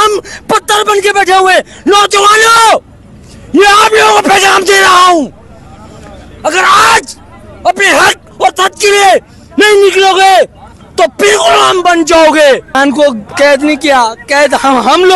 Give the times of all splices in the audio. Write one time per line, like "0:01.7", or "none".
0:12.8